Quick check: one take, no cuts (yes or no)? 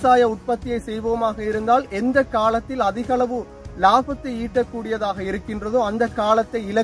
yes